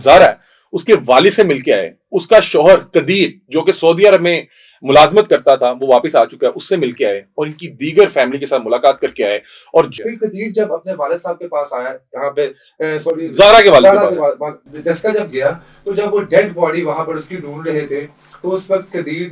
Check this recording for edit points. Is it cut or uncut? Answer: cut